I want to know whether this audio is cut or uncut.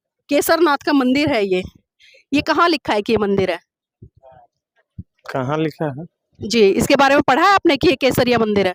uncut